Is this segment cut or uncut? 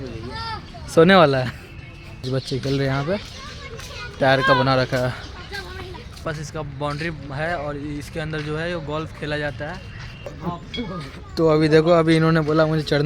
cut